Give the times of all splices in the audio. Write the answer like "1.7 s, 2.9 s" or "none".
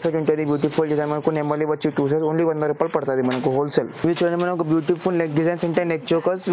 3.9 s